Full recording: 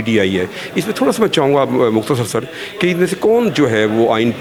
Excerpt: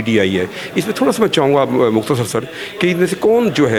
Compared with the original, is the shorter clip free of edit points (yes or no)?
yes